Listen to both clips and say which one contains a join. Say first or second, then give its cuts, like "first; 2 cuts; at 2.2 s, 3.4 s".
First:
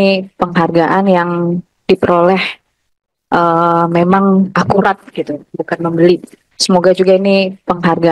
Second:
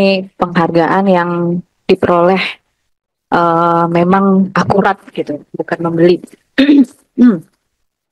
first; 1 cut; at 6.4 s